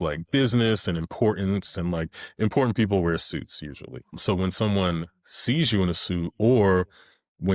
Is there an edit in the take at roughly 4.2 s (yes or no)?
yes